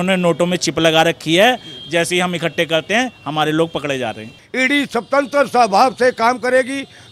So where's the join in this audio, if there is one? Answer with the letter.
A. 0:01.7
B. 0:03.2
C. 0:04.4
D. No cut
C